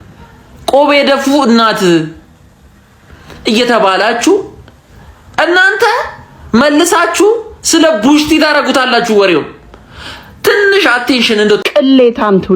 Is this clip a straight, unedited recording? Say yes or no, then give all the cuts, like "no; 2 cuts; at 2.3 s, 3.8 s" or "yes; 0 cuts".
no; 1 cut; at 11.6 s